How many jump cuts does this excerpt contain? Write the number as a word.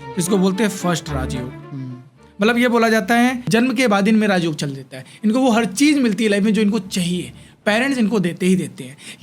one